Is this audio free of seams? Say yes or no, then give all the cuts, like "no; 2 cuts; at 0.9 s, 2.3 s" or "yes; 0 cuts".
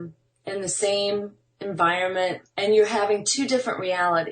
no; 1 cut; at 2.5 s